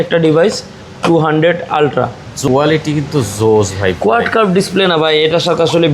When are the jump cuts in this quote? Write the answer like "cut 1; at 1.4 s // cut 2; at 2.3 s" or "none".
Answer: cut 1; at 2.4 s